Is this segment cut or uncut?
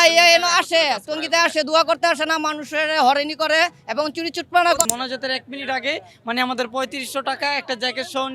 cut